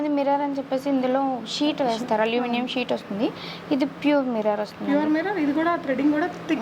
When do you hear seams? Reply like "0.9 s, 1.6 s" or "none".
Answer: none